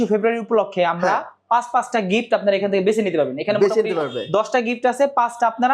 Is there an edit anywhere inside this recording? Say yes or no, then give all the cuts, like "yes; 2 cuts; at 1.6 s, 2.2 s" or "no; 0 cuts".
no; 0 cuts